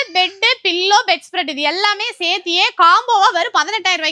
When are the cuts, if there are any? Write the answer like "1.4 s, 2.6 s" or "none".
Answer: none